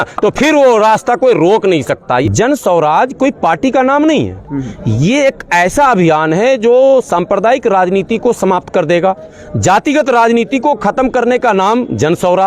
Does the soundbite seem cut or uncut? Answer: cut